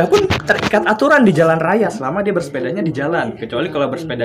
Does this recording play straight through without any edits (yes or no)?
yes